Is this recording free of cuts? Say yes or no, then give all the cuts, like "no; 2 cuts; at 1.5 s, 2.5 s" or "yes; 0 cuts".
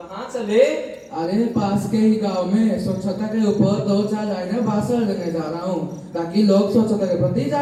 yes; 0 cuts